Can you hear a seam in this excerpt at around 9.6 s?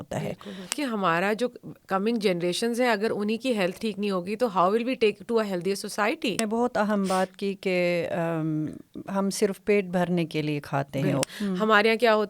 no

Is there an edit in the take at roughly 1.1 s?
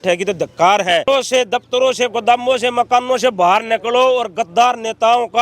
yes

